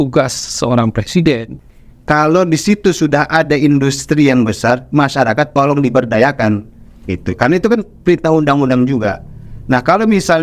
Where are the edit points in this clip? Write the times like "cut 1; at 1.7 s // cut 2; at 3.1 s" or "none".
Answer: cut 1; at 1.5 s